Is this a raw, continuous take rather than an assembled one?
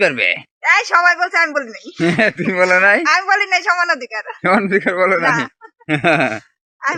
yes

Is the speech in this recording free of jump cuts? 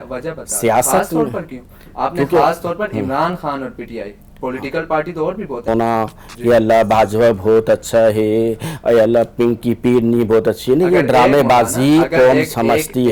no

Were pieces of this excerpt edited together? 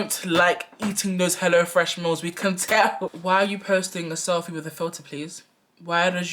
yes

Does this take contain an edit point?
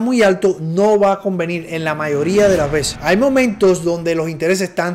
yes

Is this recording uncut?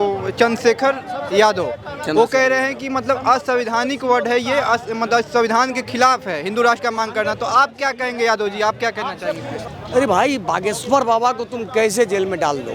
no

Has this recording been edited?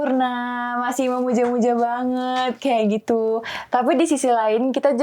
no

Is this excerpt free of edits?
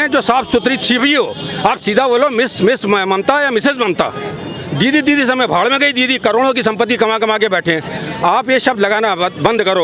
yes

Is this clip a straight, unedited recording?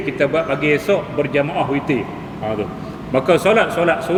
yes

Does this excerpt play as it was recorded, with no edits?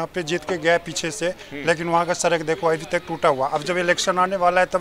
yes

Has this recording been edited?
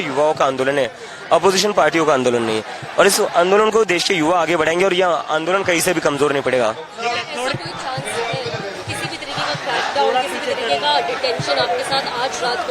no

